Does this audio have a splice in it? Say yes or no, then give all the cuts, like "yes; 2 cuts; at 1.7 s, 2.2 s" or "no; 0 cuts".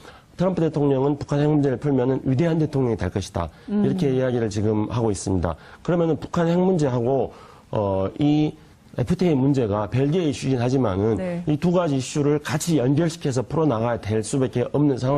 yes; 1 cut; at 1.4 s